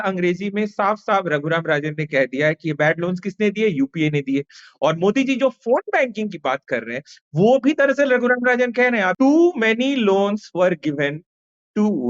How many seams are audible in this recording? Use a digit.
1